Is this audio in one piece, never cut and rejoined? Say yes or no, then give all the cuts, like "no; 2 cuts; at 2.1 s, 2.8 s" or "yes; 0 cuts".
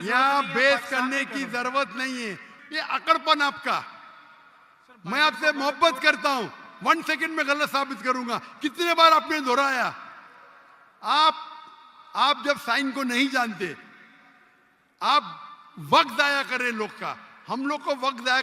no; 1 cut; at 2.5 s